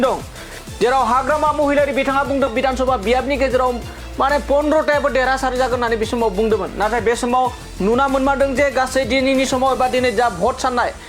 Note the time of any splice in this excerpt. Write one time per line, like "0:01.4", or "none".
0:02.5